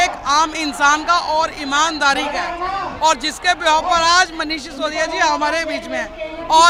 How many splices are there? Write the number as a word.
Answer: zero